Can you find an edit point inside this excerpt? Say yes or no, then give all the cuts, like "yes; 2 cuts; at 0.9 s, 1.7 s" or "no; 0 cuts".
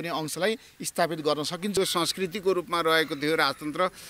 yes; 1 cut; at 1.8 s